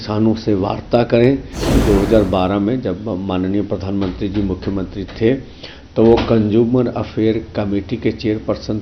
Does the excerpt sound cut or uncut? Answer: cut